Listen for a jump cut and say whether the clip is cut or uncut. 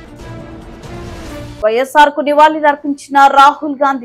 cut